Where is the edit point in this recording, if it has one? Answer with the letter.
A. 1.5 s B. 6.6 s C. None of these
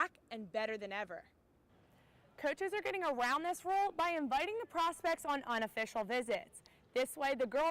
A